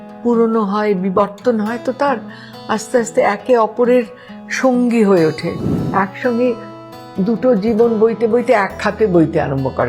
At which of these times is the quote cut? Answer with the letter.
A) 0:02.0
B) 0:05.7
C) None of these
B